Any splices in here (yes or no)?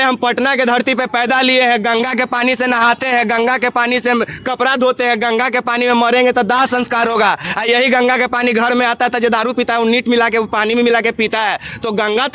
no